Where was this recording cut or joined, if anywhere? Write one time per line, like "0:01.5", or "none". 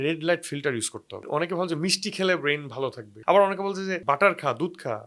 0:01.2
0:03.1
0:04.0